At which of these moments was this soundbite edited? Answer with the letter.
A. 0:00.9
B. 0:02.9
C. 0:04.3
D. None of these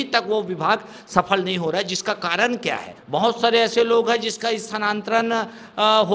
B